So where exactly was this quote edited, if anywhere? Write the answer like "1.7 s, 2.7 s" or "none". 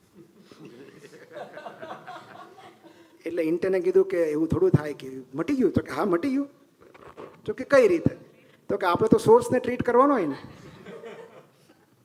none